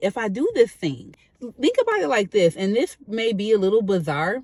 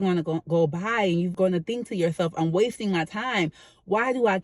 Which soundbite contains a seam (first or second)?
second